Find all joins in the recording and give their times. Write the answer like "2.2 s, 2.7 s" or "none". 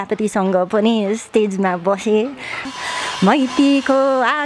2.6 s

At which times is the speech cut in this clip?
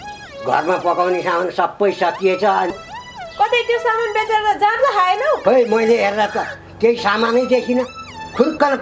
2.7 s

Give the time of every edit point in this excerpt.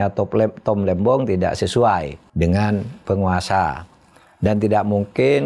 2.2 s

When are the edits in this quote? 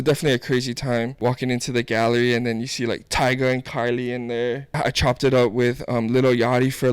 1.1 s, 4.7 s

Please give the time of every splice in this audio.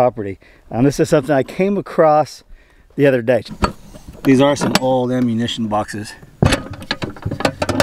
3.5 s

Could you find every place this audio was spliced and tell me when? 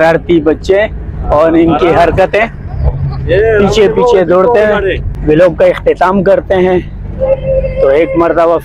5.1 s

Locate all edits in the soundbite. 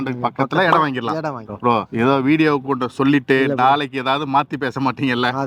none

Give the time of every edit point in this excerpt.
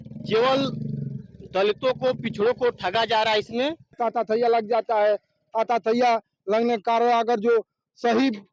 3.9 s

